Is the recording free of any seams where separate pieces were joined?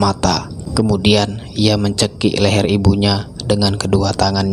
yes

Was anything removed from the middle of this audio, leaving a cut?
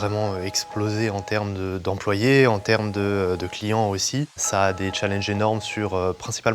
yes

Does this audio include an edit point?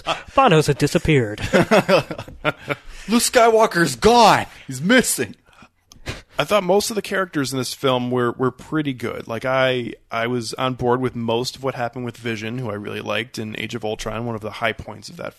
no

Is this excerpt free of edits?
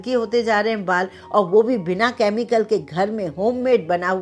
yes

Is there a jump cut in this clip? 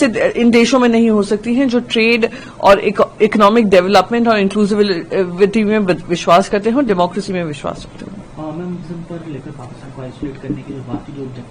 no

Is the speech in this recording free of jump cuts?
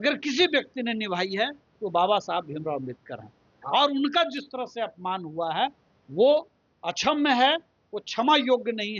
yes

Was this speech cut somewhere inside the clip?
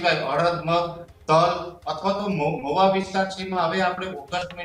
no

